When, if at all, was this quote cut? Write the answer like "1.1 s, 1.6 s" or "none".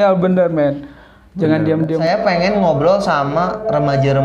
2.0 s